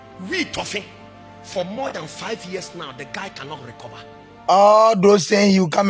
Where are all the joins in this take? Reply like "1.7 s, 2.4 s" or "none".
4.3 s